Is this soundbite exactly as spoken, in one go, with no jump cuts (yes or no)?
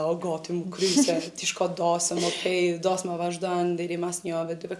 yes